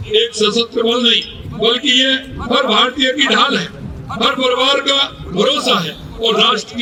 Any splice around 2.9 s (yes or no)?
no